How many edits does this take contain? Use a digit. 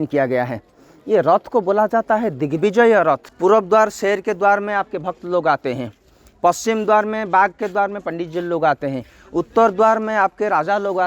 1